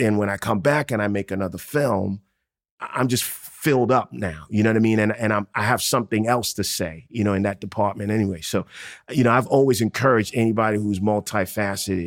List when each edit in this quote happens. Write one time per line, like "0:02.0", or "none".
0:02.6